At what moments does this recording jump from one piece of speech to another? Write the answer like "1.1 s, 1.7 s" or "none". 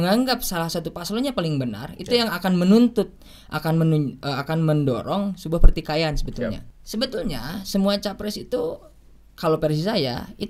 6.7 s